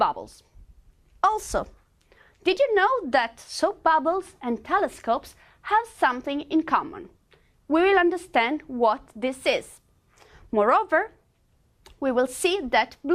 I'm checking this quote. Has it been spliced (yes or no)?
no